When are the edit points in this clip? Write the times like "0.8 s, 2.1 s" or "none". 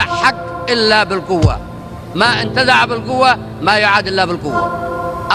none